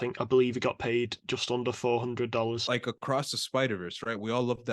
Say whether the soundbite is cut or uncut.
cut